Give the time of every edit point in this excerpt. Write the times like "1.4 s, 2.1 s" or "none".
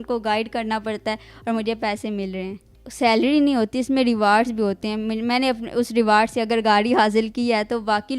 2.8 s